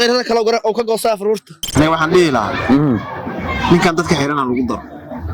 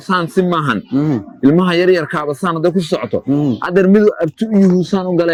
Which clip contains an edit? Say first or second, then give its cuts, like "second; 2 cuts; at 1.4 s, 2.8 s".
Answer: first; 1 cut; at 1.7 s